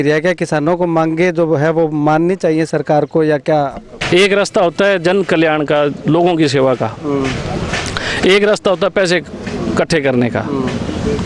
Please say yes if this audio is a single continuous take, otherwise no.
no